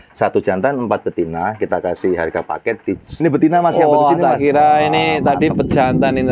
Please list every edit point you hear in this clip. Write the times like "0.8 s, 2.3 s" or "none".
3.2 s